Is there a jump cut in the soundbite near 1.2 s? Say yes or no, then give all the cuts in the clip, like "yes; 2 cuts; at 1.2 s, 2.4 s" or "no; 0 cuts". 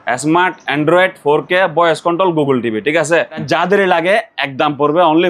no; 1 cut; at 3.4 s